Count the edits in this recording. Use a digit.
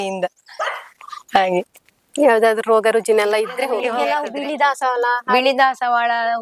1